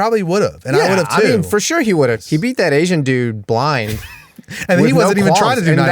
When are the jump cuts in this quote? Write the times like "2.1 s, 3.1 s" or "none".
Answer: 2.2 s